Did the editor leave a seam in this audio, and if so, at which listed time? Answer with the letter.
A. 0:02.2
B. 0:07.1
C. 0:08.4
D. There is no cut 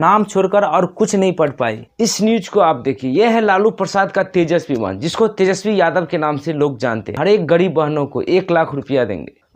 B